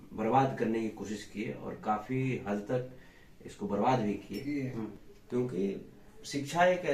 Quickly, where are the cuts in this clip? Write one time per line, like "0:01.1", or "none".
0:04.9